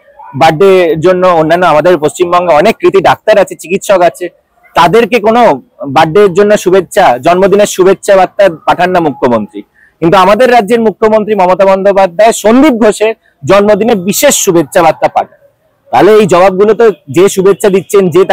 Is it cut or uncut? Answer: uncut